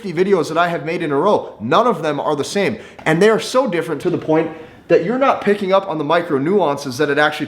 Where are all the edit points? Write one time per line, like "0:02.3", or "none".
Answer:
0:02.9
0:03.9